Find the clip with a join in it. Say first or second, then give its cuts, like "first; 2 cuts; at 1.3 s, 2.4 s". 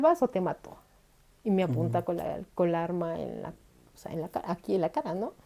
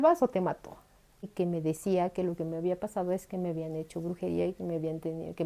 second; 1 cut; at 1.3 s